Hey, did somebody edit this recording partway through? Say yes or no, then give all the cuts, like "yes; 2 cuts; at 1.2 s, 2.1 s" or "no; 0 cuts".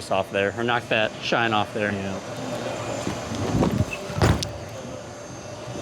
yes; 1 cut; at 2.3 s